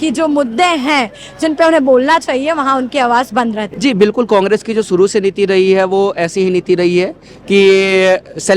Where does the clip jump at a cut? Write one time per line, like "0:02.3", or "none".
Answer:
0:03.7